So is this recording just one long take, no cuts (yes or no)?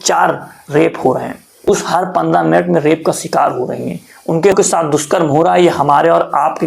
no